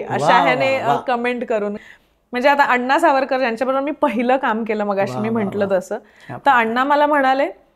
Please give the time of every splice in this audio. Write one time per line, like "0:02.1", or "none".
0:01.8